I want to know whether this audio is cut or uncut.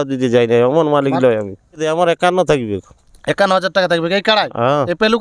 cut